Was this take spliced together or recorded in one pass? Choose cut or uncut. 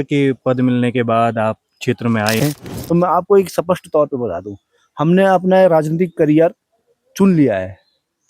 cut